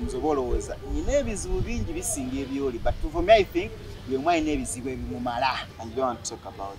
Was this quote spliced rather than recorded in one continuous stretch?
yes; 1 cut; at 5.7 s

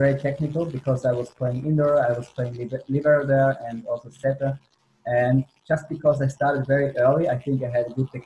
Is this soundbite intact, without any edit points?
yes; 0 cuts

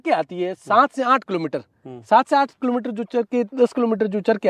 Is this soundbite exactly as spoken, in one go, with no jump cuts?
yes; 0 cuts

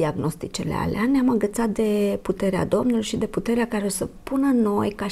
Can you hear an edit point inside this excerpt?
no; 0 cuts

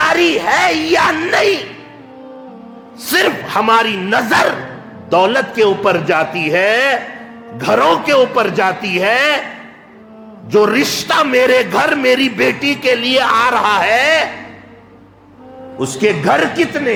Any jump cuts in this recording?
no; 0 cuts

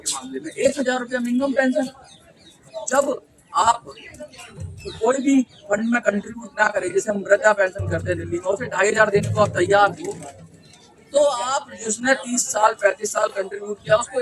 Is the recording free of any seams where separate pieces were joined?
yes; 0 cuts

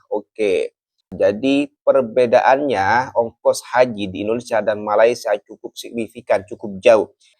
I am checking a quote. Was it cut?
yes; 1 cut; at 1.1 s

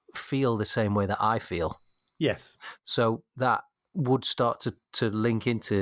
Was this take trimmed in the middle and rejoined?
no; 0 cuts

